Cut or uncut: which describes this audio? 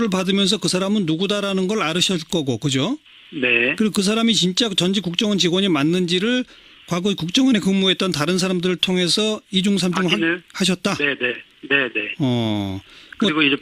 uncut